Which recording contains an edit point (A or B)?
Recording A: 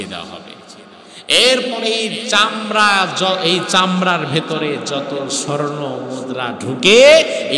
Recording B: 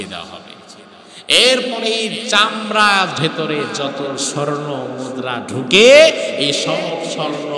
B